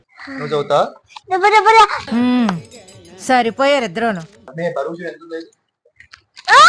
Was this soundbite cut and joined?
yes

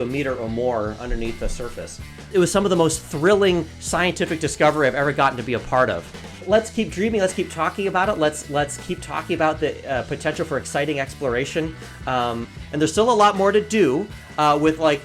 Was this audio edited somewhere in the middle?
yes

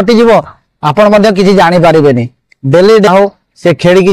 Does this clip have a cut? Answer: yes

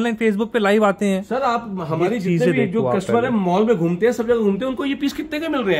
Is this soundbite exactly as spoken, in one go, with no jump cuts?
yes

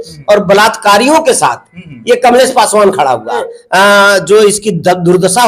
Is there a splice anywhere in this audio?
yes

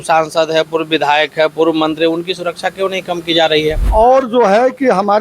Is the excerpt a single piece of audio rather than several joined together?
no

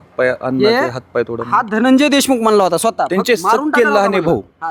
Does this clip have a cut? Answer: no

